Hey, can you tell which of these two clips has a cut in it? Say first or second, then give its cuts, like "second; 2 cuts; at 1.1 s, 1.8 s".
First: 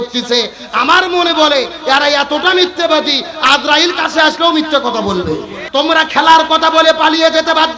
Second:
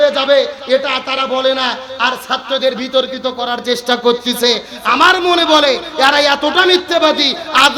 first; 1 cut; at 5.5 s